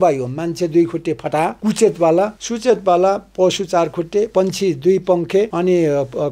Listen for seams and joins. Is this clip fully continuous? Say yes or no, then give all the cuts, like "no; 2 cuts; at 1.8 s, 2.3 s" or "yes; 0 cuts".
no; 4 cuts; at 1.6 s, 2.4 s, 4.3 s, 5.5 s